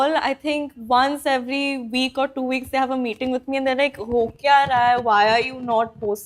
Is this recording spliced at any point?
no; 0 cuts

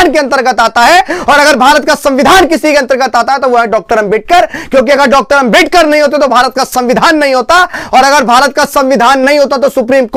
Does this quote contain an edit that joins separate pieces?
no; 0 cuts

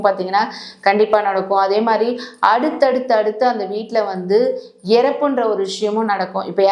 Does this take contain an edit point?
no; 0 cuts

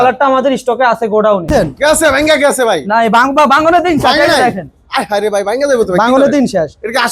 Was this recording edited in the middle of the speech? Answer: yes; 1 cut; at 1.5 s

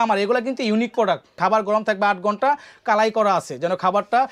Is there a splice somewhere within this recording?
yes; 1 cut; at 1.4 s

